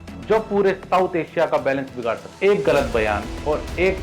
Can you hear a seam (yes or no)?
yes